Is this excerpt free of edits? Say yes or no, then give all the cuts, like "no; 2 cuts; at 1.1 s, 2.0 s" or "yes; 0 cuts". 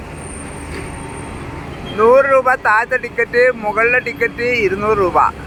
yes; 0 cuts